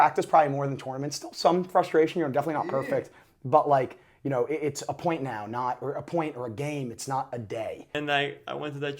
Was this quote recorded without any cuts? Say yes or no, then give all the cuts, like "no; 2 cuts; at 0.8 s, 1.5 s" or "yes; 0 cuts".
no; 1 cut; at 7.9 s